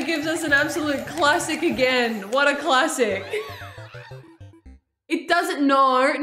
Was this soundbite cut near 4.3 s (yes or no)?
yes